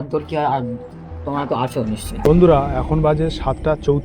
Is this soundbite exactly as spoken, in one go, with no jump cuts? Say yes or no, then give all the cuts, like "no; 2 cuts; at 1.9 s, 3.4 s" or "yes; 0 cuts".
no; 1 cut; at 2.2 s